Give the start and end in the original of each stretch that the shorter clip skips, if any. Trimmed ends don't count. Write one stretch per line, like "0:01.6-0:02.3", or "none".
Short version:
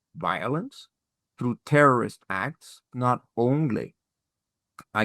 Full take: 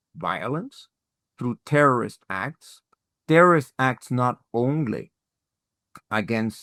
0:02.9-0:04.1